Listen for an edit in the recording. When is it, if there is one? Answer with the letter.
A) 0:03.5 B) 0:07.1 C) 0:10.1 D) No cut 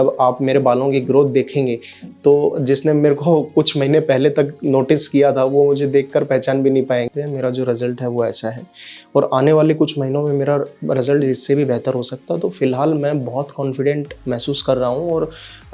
B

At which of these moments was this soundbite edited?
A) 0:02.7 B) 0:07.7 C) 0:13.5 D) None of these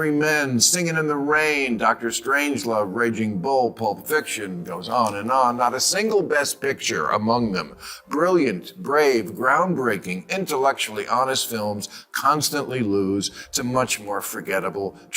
D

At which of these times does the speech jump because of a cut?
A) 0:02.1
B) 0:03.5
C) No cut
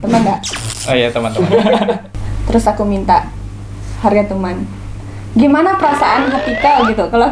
A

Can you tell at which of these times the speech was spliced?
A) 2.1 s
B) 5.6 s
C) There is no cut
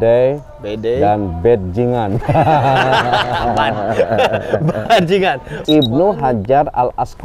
B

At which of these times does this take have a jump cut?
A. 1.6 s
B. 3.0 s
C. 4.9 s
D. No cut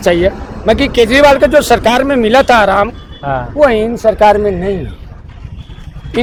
D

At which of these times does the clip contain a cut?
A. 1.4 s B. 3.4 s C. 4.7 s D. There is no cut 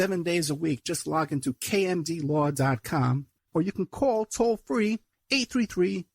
B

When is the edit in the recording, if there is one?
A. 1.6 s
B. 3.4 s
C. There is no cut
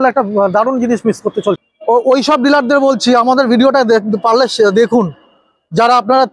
A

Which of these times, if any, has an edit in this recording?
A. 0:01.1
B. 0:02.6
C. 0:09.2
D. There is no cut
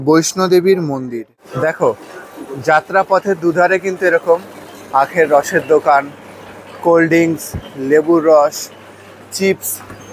A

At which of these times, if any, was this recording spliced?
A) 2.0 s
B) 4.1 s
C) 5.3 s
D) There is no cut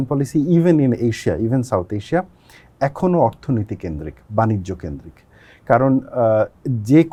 D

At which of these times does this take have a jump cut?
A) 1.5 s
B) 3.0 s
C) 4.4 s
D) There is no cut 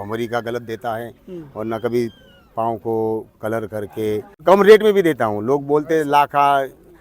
C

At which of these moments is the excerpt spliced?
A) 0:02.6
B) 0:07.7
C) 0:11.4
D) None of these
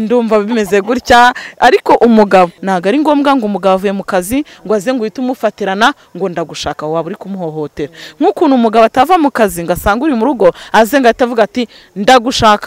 A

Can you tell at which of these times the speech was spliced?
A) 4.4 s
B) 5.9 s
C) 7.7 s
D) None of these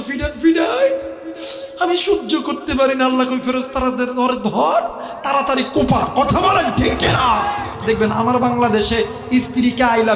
C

